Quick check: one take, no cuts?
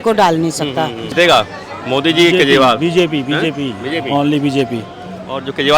no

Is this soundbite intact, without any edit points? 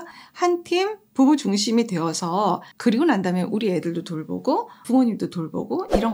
no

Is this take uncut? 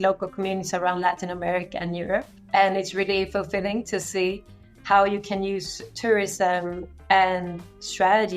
no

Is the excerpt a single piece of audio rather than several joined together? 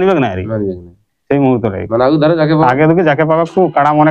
yes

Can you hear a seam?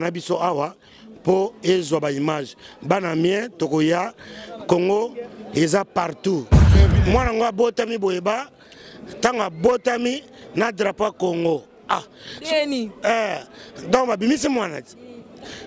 yes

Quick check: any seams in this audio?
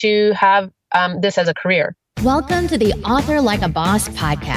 yes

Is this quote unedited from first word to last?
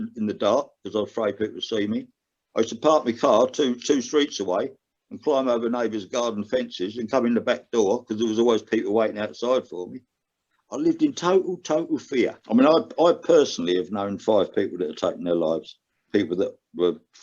no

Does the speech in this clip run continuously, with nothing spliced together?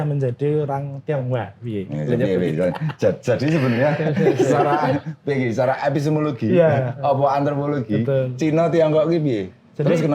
yes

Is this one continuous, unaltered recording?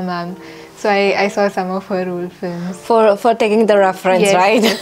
yes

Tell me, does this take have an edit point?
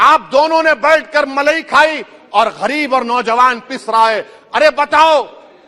no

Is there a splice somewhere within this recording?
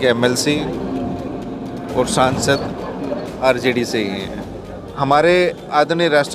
yes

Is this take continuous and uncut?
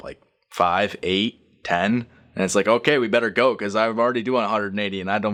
yes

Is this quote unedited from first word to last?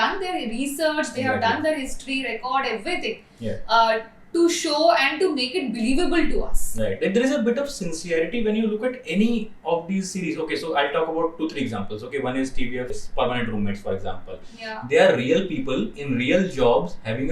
yes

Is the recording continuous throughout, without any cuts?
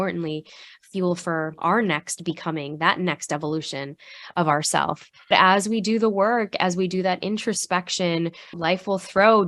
no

